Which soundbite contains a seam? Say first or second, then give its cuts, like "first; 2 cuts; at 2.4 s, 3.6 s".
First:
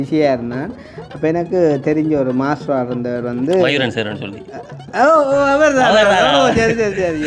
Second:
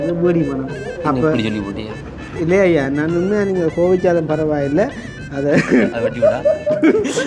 second; 1 cut; at 0.9 s